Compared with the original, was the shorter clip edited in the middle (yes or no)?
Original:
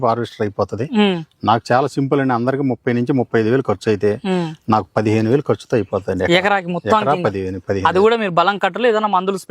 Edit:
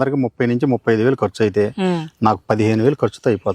no